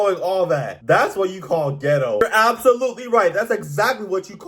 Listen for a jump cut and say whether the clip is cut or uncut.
cut